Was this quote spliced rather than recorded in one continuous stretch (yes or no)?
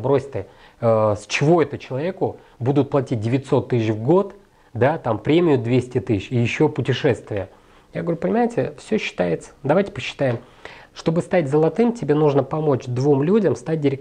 no